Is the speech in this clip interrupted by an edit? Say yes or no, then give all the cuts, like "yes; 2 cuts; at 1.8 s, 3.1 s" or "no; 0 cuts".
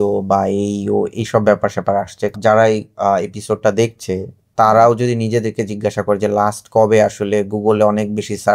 yes; 1 cut; at 2.3 s